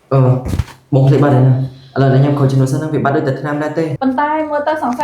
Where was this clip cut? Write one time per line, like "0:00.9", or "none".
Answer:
0:03.9